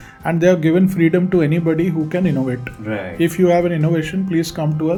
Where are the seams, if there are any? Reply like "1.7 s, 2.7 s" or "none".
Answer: none